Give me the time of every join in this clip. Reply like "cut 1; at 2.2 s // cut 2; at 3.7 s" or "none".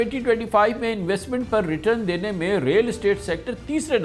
none